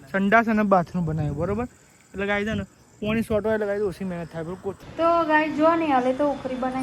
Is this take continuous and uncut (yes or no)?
no